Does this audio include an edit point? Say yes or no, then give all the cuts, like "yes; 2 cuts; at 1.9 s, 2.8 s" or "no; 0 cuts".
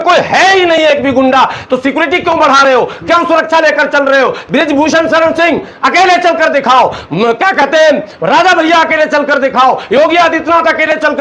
no; 0 cuts